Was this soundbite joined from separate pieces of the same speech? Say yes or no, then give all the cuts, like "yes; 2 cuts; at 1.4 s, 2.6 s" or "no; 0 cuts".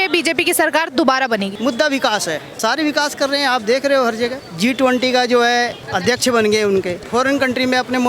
yes; 5 cuts; at 1.5 s, 2.5 s, 4.4 s, 5.8 s, 7.0 s